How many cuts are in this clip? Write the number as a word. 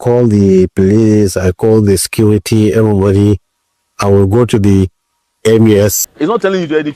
one